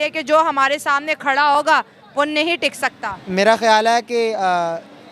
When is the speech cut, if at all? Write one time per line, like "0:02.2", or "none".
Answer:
none